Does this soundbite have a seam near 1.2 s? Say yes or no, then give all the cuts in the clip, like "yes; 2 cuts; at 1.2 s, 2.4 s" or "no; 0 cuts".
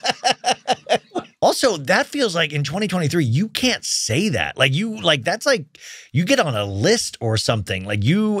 yes; 1 cut; at 1.2 s